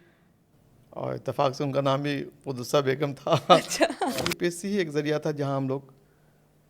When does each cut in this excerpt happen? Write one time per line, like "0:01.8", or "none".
0:04.1